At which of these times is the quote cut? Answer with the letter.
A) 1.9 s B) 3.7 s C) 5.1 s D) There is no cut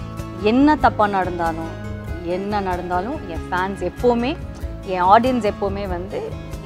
D